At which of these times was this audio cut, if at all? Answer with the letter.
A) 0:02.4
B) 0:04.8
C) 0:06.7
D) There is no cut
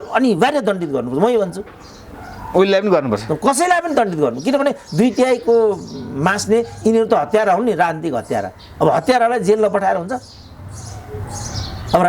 D